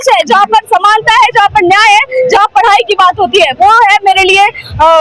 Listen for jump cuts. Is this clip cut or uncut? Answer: uncut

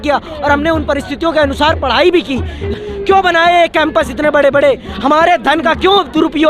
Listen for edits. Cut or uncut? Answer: cut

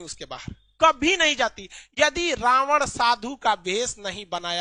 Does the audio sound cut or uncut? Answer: uncut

